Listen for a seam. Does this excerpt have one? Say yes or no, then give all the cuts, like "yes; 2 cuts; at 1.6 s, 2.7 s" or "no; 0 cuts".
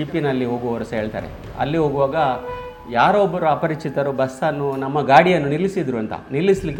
no; 0 cuts